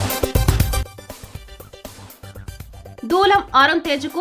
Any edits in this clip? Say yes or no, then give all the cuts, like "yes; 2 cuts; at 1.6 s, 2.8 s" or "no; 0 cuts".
yes; 1 cut; at 0.9 s